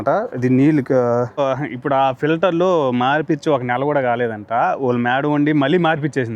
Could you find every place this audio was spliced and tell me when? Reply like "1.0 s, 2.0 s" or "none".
1.3 s

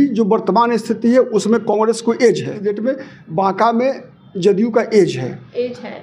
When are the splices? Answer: 2.7 s

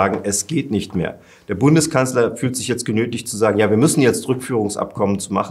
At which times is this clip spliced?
none

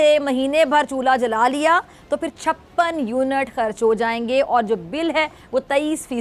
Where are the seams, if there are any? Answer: none

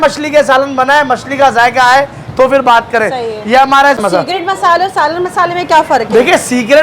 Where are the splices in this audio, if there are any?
4.0 s

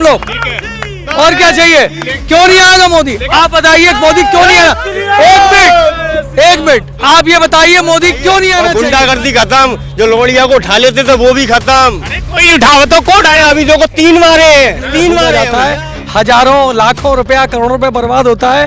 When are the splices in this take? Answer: 8.7 s, 15.4 s

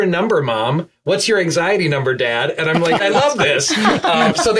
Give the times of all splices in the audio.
3.0 s

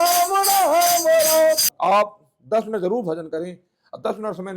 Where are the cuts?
1.7 s

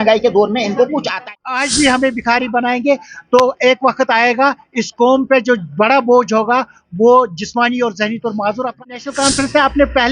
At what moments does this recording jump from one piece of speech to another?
1.3 s, 8.7 s

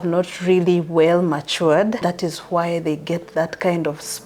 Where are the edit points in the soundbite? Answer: 2.0 s

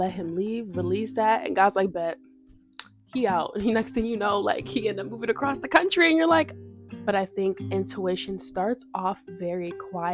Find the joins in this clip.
6.9 s

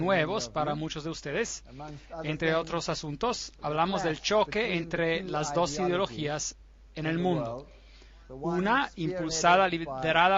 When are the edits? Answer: 8.4 s

